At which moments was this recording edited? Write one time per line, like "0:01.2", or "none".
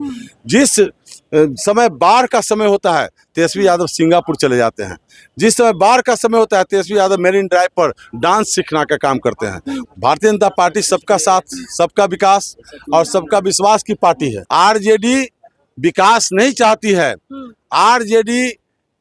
0:09.8
0:14.4